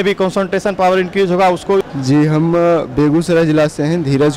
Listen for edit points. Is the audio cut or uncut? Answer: cut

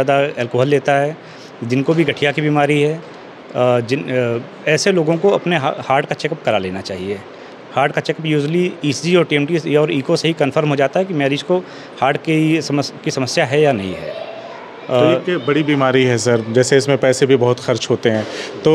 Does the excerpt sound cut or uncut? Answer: uncut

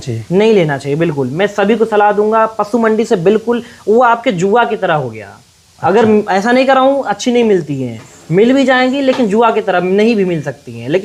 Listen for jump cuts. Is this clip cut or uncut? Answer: uncut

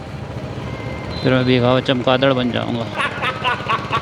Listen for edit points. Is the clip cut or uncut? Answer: uncut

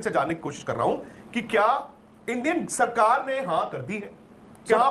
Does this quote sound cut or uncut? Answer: uncut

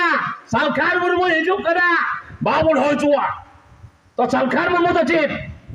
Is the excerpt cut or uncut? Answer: uncut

